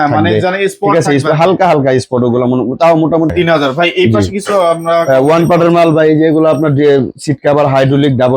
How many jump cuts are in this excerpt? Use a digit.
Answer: 1